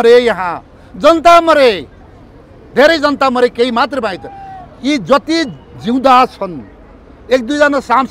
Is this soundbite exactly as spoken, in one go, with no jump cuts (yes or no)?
yes